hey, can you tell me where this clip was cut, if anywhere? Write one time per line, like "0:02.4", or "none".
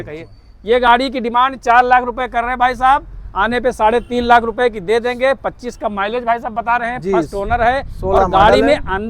none